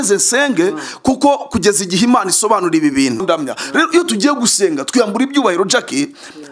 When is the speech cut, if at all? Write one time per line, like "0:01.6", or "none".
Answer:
0:03.2